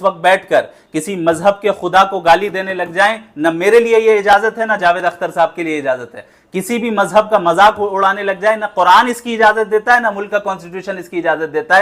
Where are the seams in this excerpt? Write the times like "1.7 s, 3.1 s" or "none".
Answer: none